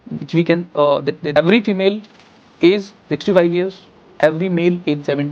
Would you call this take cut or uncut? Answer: cut